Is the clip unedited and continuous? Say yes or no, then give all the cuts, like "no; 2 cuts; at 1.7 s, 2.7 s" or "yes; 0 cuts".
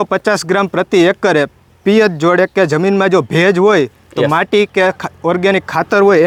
yes; 0 cuts